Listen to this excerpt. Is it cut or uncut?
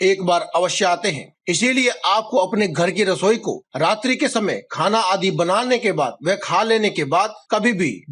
uncut